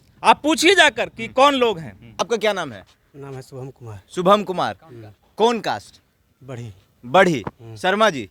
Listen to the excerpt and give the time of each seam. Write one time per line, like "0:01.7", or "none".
0:02.2